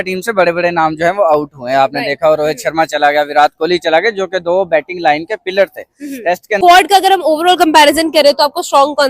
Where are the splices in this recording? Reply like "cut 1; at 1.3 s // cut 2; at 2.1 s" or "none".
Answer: cut 1; at 6.6 s